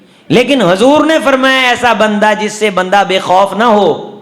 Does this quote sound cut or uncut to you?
uncut